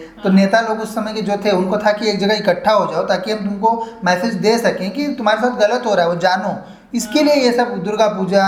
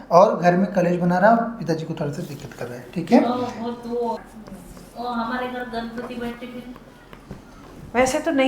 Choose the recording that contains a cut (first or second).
second